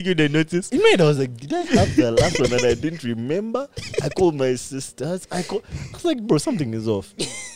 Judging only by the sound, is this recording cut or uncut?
uncut